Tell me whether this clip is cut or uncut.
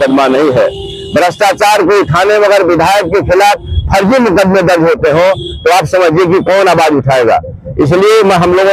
uncut